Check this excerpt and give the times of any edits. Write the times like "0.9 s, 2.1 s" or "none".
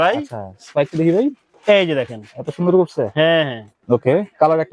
3.7 s